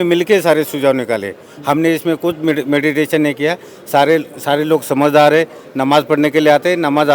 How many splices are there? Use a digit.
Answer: 0